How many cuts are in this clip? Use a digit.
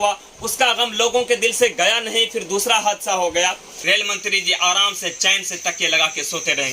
1